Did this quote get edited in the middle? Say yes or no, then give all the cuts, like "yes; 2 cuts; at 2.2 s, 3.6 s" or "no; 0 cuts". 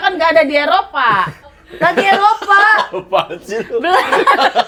no; 0 cuts